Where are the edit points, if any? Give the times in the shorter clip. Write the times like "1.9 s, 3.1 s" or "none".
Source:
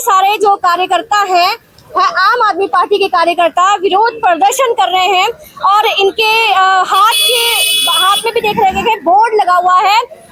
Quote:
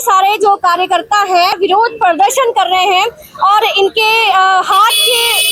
1.6 s